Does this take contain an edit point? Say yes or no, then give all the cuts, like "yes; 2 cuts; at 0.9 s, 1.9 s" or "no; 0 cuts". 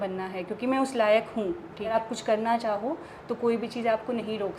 yes; 1 cut; at 1.9 s